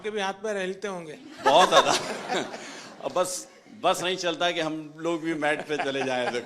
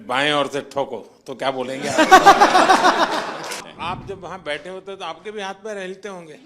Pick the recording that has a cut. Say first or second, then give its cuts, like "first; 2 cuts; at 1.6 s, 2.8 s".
second; 1 cut; at 3.7 s